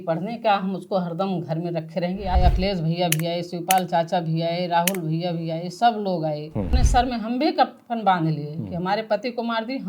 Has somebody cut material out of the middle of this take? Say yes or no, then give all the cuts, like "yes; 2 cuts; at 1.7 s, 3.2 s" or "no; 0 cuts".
yes; 2 cuts; at 2.4 s, 6.8 s